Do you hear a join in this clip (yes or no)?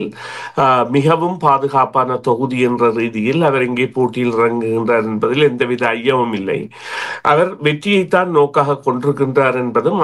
no